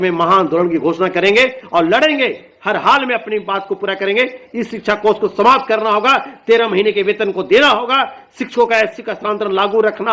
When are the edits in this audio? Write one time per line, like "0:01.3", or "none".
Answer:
none